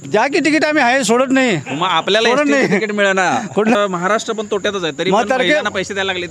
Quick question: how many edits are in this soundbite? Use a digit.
1